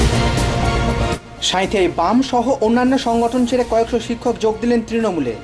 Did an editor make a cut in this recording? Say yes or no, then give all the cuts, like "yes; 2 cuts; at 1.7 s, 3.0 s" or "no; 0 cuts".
yes; 1 cut; at 1.3 s